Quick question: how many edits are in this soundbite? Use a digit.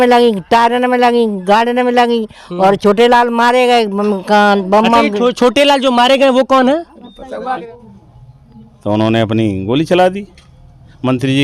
1